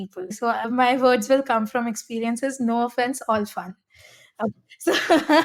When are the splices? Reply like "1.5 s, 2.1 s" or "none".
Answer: none